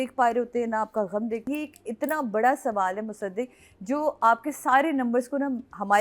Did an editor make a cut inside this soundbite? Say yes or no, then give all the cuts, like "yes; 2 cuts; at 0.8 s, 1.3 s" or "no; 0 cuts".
yes; 1 cut; at 1.4 s